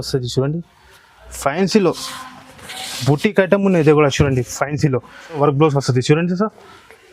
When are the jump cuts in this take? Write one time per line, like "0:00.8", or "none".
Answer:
0:05.4